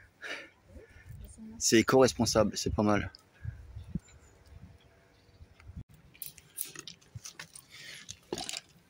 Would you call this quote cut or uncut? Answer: cut